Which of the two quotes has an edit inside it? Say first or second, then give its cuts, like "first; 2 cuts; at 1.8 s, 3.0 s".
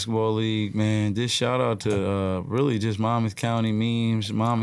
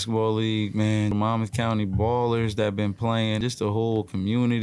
second; 2 cuts; at 1.1 s, 3.4 s